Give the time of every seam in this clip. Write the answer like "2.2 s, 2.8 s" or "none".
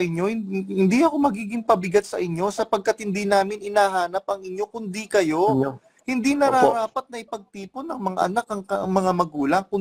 none